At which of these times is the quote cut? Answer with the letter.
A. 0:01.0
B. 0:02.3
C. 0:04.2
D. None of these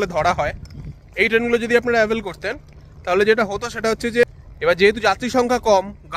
C